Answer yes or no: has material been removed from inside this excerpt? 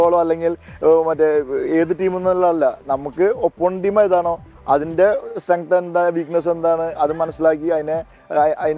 no